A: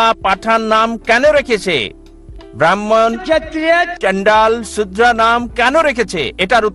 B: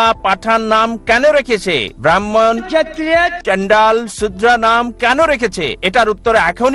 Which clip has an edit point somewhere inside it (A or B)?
B